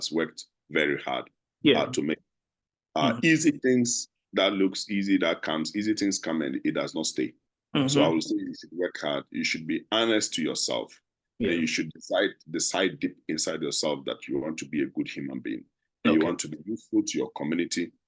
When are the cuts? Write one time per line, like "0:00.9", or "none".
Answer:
none